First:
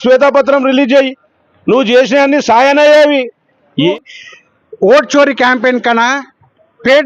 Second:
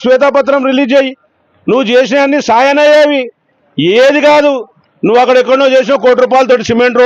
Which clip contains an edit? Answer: first; 1 cut; at 3.9 s

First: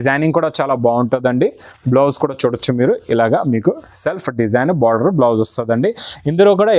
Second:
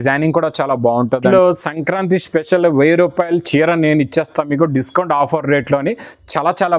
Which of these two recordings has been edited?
second; 1 cut; at 1.2 s

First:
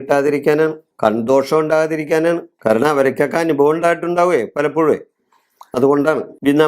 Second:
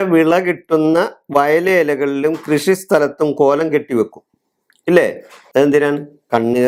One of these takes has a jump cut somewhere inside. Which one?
first; 2 cuts; at 0.9 s, 2.5 s

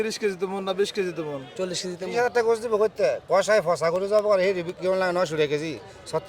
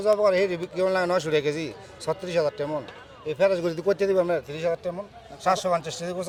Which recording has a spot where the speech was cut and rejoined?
first; 1 cut; at 2.0 s

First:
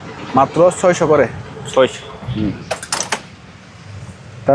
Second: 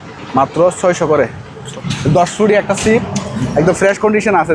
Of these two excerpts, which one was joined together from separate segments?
second; 1 cut; at 1.6 s

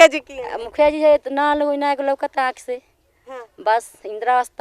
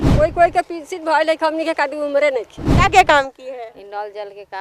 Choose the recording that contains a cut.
second; 1 cut; at 2.6 s

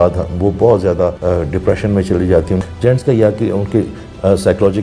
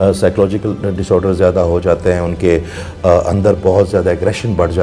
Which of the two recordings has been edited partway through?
first; 2 cuts; at 1.2 s, 2.6 s

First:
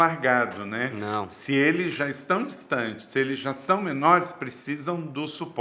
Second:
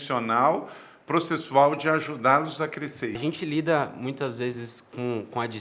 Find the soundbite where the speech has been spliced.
second; 1 cut; at 3.2 s

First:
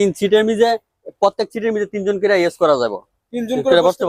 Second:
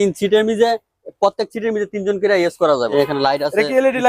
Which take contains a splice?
second; 1 cut; at 2.9 s

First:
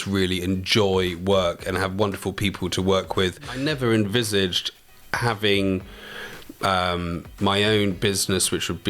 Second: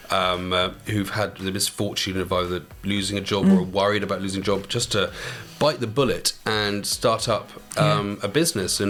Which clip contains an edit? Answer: first; 1 cut; at 3.6 s

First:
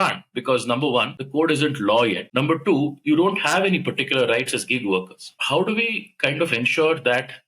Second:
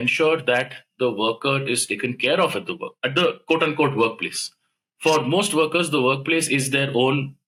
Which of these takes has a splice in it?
first; 3 cuts; at 1.2 s, 2.2 s, 5.3 s

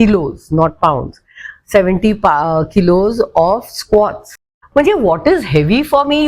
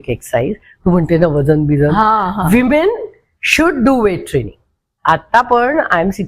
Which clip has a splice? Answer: first; 1 cut; at 4.4 s

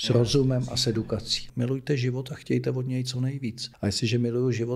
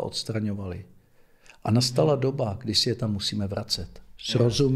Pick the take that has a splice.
first; 2 cuts; at 1.4 s, 3.7 s

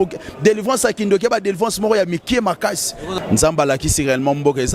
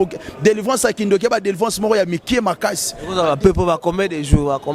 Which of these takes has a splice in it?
first; 1 cut; at 3.0 s

